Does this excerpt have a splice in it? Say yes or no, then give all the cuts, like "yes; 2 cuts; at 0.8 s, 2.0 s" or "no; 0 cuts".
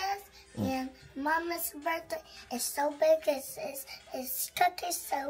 no; 0 cuts